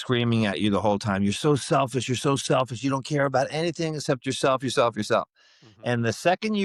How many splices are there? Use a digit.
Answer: 0